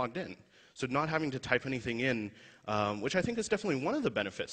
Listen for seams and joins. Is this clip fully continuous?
no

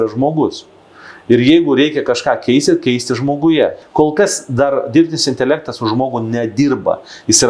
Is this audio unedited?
no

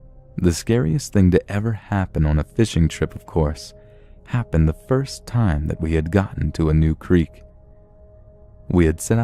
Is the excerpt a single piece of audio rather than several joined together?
no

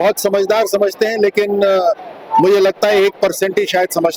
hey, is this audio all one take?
yes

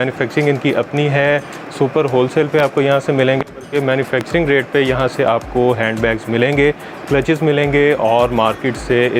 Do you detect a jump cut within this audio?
no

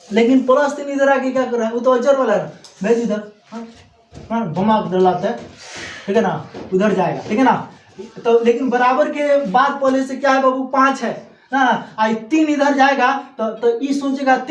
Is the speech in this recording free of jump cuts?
yes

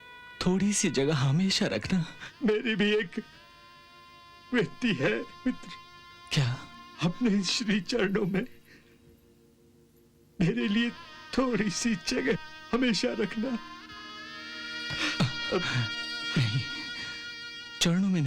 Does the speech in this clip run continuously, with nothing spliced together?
no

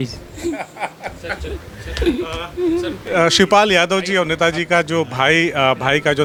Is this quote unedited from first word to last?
yes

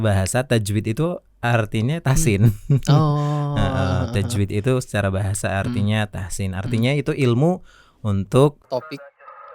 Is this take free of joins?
no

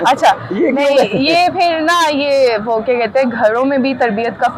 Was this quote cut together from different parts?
no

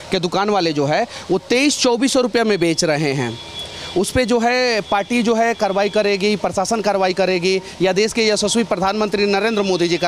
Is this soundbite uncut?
yes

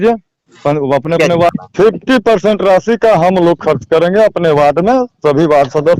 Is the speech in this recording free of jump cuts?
no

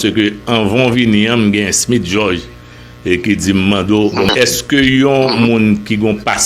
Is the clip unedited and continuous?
no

